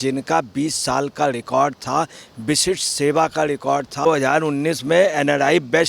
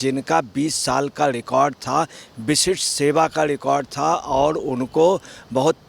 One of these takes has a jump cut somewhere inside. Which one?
first; 1 cut; at 4.1 s

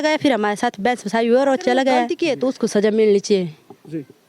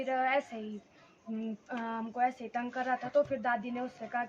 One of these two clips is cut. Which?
first; 1 cut; at 2.1 s

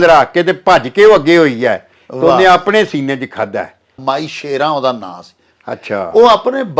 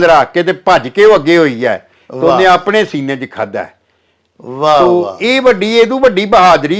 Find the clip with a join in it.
first; 1 cut; at 4.0 s

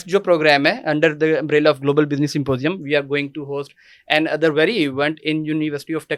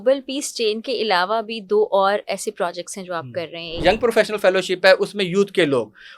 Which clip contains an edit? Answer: second; 1 cut; at 3.8 s

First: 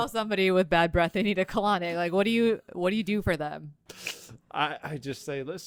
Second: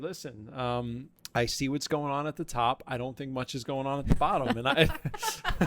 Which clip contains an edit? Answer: second; 1 cut; at 1.1 s

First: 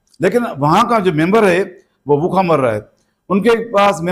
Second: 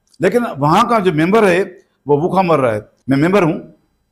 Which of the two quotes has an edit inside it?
second; 1 cut; at 2.9 s

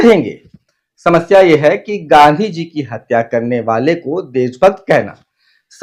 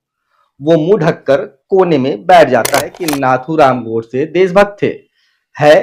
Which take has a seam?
second; 1 cut; at 3.0 s

